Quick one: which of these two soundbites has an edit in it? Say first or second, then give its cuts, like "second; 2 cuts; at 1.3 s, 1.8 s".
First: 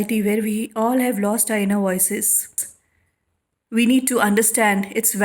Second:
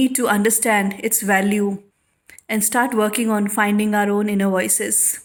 first; 1 cut; at 2.5 s